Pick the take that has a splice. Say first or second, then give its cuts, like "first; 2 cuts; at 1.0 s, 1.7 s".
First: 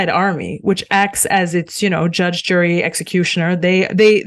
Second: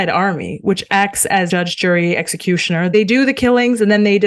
second; 2 cuts; at 1.5 s, 2.9 s